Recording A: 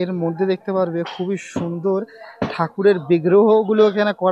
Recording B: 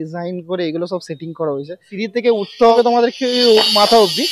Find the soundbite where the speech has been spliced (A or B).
B